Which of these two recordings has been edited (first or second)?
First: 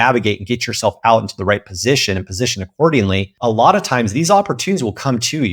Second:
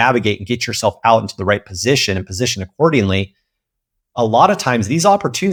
first